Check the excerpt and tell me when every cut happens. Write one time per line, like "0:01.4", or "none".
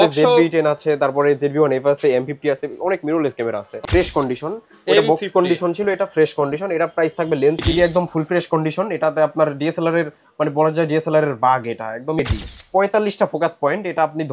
0:03.8
0:07.6
0:12.2